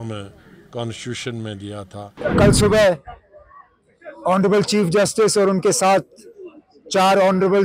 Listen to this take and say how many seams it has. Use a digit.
1